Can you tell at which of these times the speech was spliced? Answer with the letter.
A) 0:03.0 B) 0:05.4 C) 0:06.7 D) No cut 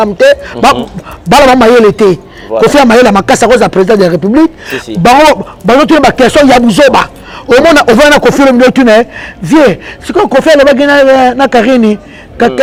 D